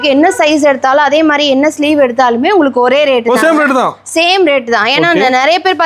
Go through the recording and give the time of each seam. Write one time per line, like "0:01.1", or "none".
none

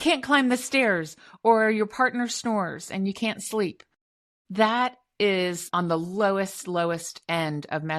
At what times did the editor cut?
none

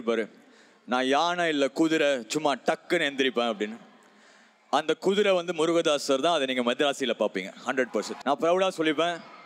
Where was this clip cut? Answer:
0:08.1

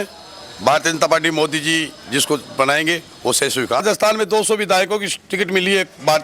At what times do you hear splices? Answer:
0:03.8

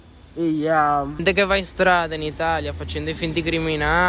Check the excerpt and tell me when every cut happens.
0:01.2

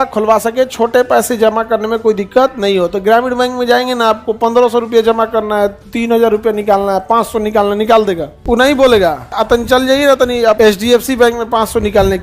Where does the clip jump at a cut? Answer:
0:08.3
0:09.3
0:10.6

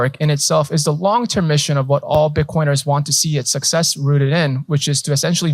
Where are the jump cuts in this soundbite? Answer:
none

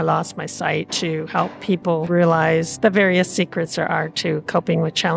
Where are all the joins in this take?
0:00.9
0:02.1

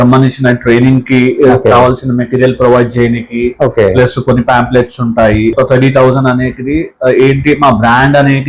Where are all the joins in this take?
0:05.5

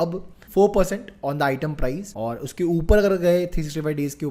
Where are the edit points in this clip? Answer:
0:02.1

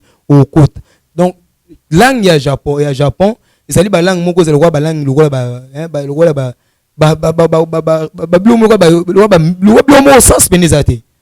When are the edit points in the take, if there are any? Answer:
0:00.9

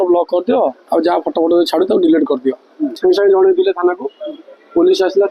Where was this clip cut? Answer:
0:02.9

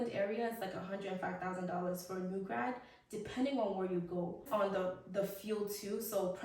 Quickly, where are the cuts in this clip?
0:04.5

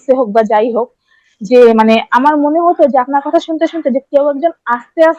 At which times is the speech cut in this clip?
none

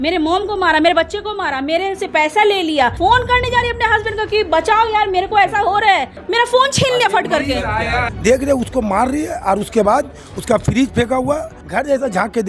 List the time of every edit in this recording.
0:03.0
0:06.2
0:07.8
0:11.6

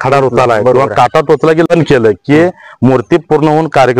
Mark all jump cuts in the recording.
0:01.7

